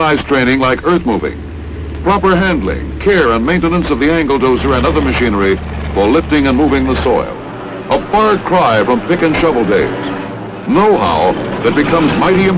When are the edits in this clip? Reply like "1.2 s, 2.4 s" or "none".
4.6 s